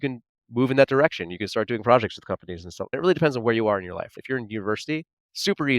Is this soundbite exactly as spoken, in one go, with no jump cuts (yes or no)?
no